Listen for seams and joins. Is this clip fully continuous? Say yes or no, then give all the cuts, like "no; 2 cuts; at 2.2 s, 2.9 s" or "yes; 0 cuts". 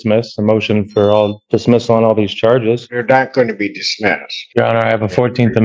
no; 3 cuts; at 1.4 s, 2.9 s, 4.3 s